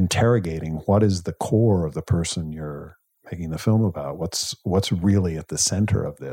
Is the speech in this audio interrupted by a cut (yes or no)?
no